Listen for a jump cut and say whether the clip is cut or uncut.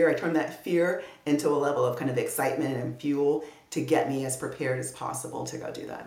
uncut